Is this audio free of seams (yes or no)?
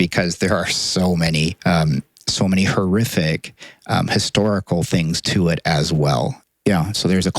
no